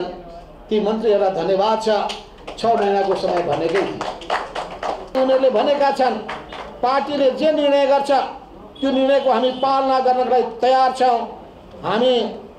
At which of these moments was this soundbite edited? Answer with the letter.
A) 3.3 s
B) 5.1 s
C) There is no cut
B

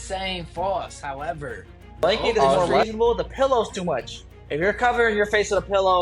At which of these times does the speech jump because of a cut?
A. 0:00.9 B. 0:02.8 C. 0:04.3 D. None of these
B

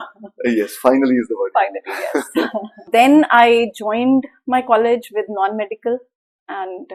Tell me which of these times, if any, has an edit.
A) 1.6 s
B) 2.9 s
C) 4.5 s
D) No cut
B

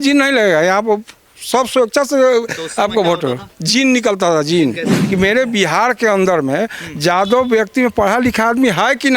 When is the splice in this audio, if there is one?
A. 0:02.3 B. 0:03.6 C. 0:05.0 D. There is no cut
C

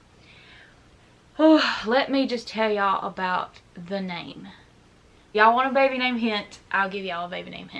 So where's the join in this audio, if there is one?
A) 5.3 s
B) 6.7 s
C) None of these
A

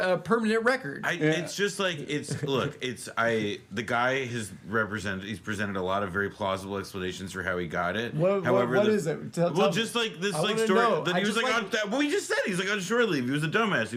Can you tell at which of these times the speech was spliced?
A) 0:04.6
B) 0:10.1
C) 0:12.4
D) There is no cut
D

